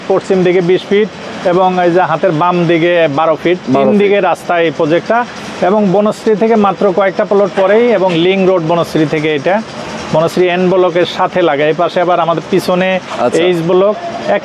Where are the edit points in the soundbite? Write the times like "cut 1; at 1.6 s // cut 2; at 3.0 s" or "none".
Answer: none